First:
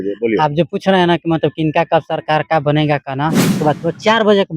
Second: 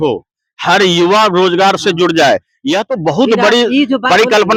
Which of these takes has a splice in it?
first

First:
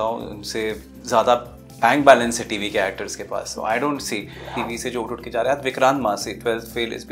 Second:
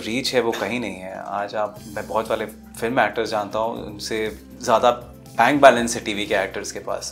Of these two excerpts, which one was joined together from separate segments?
first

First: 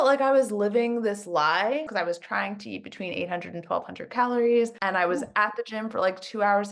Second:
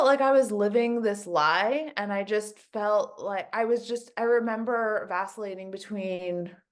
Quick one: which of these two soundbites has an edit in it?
first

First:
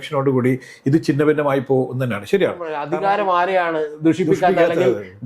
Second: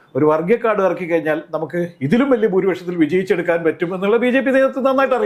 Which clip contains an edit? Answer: first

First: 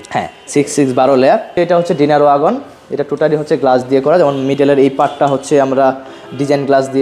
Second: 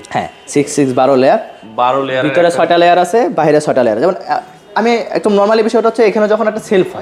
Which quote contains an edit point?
first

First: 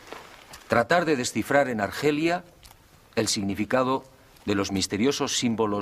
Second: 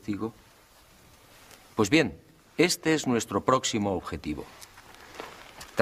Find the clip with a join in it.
second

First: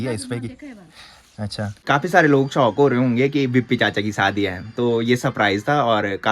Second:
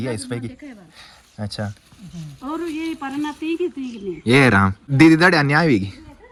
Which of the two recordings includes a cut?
first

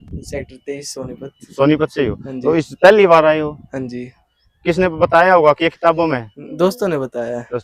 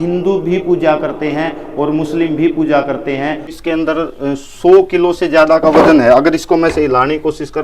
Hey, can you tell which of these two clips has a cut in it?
second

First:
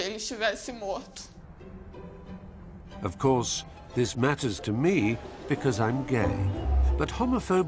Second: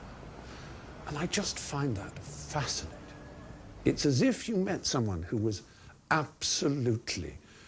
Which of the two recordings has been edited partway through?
first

